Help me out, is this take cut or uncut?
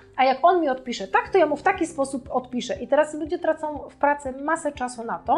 uncut